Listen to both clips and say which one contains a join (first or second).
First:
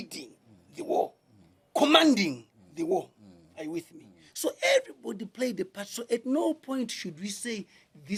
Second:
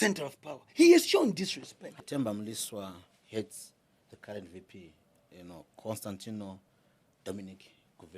second